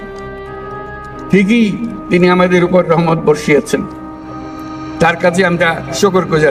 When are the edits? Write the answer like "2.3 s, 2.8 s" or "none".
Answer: none